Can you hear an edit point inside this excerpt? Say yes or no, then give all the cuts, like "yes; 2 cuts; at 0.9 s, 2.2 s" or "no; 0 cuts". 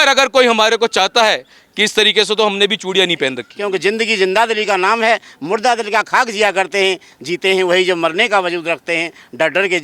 yes; 1 cut; at 3.5 s